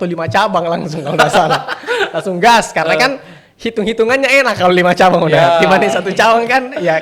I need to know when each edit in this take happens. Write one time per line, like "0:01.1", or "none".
none